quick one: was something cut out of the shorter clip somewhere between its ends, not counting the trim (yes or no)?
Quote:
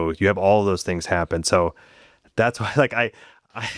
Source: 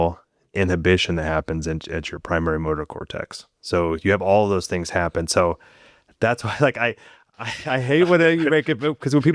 no